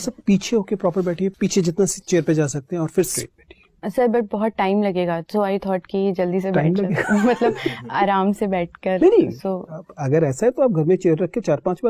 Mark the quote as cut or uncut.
cut